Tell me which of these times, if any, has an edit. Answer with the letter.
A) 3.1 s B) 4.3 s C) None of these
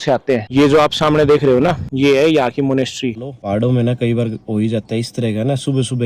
A